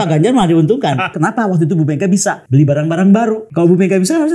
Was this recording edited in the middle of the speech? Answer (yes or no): yes